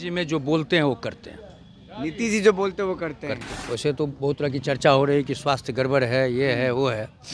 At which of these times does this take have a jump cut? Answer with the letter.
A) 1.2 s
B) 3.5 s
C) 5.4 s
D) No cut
B